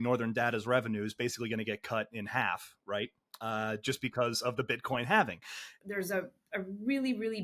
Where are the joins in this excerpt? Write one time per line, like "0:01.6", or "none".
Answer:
0:05.8